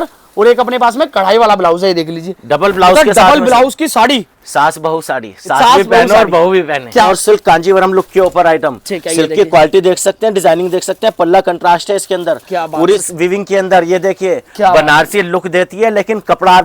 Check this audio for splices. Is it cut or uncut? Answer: cut